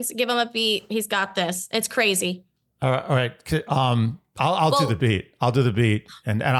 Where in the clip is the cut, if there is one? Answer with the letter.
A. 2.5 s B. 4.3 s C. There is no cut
C